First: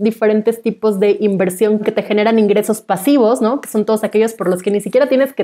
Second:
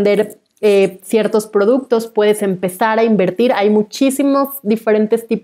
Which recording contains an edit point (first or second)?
first